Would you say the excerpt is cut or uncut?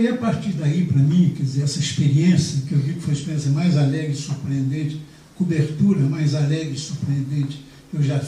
uncut